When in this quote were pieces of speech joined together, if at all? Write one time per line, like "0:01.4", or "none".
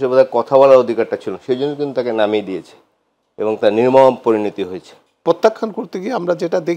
0:05.2